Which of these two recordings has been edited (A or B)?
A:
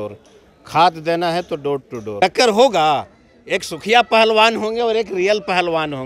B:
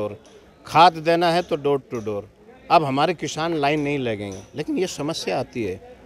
A